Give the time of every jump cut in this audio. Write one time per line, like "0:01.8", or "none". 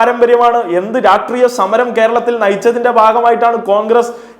none